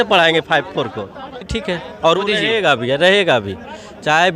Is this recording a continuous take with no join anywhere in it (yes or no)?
no